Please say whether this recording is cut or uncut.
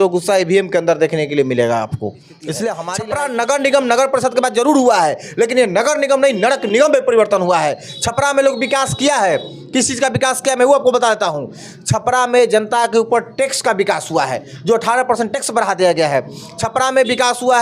cut